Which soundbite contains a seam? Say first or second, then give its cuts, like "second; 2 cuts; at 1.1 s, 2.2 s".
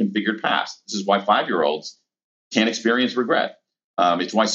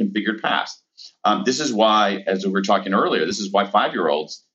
first; 1 cut; at 0.9 s